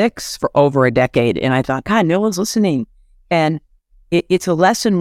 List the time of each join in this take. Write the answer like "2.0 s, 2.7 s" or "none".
none